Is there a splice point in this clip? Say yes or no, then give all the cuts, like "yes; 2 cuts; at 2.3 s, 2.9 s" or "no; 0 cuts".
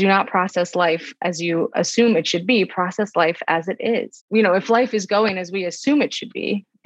yes; 2 cuts; at 1.7 s, 4.2 s